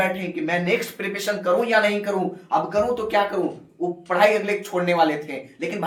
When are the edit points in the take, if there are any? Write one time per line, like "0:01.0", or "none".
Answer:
none